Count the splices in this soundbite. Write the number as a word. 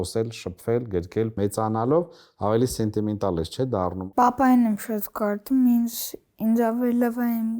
two